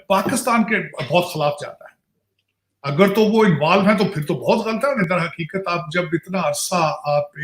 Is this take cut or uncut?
cut